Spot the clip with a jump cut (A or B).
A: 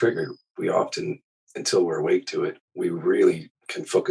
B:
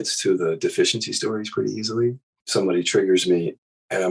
B